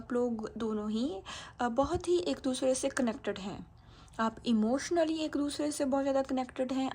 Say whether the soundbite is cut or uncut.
uncut